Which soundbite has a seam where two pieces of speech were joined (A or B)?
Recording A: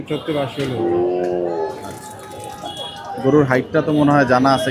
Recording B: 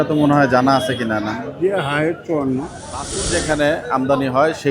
B